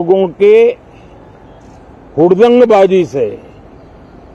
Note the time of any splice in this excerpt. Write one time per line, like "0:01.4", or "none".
none